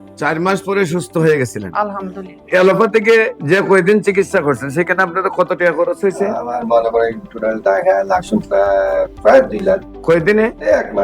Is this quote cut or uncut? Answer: cut